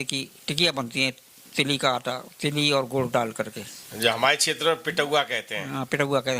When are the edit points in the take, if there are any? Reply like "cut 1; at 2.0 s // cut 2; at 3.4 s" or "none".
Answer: none

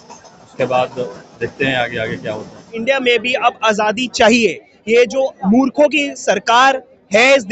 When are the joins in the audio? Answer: cut 1; at 2.7 s

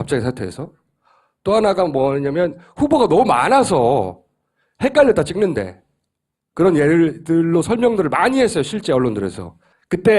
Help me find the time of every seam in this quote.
cut 1; at 7.8 s

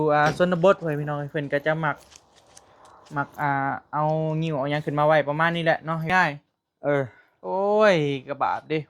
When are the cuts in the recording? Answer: cut 1; at 6.1 s

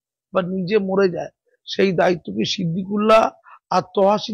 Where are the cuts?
none

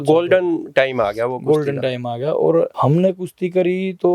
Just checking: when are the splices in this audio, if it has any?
none

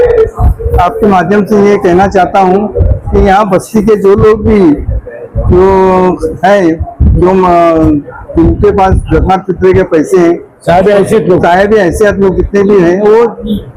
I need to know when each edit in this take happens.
none

